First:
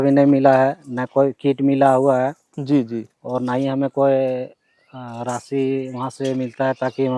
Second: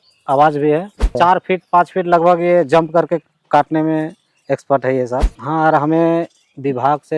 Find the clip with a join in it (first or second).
second